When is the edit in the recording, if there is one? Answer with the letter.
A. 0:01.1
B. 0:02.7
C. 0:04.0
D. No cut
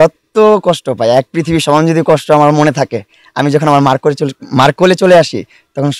D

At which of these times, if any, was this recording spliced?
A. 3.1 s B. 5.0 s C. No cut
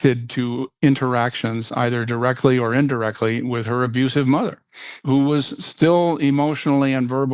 B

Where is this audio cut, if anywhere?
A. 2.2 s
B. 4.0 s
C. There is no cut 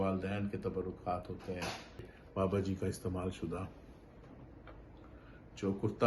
A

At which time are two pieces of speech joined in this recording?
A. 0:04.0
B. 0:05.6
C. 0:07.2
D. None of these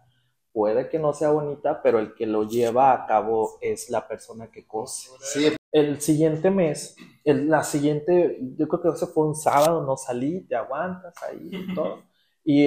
B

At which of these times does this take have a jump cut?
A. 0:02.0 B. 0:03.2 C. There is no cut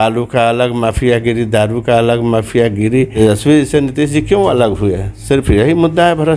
B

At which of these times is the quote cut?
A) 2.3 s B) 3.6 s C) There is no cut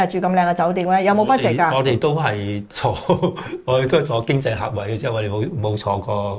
C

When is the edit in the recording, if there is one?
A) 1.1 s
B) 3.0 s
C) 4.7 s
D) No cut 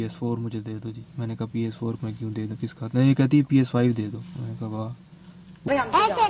A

